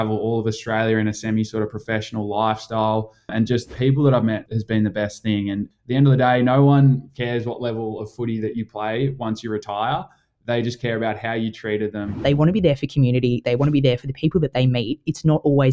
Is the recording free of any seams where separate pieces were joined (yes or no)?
no